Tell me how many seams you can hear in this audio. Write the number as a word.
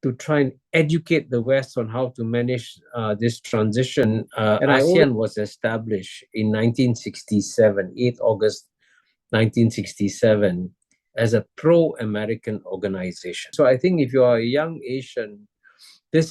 two